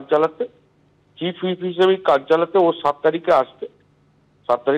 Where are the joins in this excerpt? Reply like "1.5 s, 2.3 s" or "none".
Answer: none